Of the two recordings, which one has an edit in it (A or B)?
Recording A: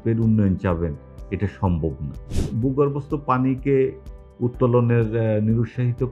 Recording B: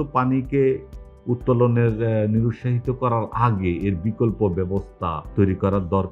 A